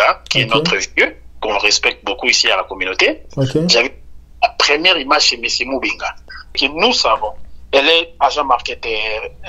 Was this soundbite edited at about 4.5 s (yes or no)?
no